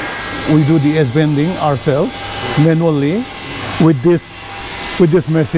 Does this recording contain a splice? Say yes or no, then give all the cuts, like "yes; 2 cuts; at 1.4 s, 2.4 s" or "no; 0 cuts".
no; 0 cuts